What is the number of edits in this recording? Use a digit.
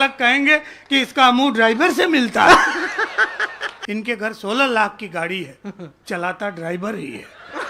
1